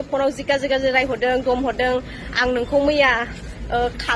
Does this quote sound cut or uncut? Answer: uncut